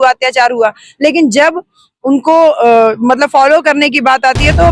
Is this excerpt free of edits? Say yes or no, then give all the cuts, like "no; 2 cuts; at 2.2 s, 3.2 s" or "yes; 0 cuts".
yes; 0 cuts